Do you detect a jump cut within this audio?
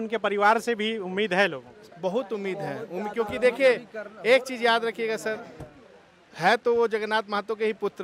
no; 0 cuts

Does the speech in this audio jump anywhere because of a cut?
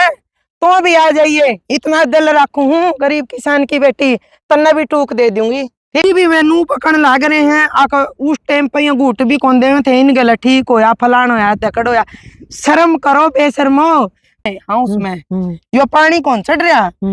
yes; 2 cuts; at 6.0 s, 14.5 s

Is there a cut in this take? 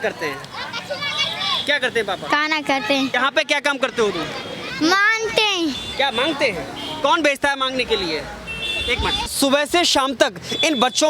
yes; 3 cuts; at 3.1 s, 4.6 s, 9.3 s

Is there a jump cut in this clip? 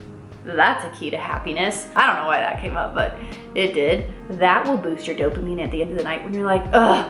yes; 2 cuts; at 1.9 s, 4.1 s

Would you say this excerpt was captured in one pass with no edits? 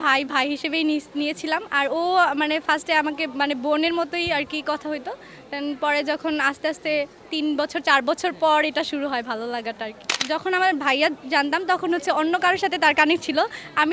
no; 1 cut; at 10.2 s

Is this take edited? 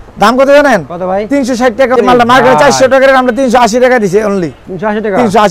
yes; 1 cut; at 2.0 s

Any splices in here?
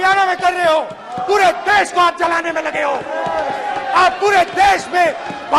no; 0 cuts

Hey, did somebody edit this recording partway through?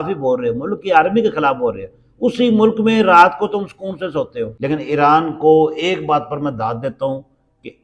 yes; 1 cut; at 4.5 s

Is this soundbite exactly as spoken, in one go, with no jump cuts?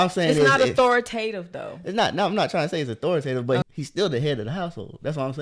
no; 1 cut; at 3.8 s

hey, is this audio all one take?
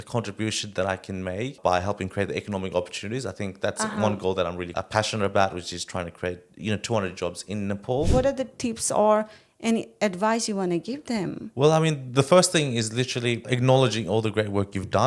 no; 4 cuts; at 1.6 s, 4.7 s, 8.1 s, 13.4 s

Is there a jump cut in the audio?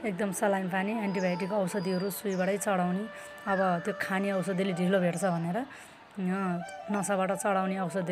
no; 0 cuts

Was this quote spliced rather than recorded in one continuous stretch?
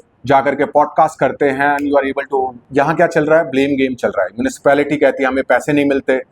yes; 1 cut; at 2.6 s

